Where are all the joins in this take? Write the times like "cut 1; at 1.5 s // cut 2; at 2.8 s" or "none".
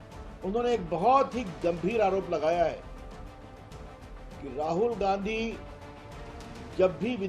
cut 1; at 3.2 s // cut 2; at 4.4 s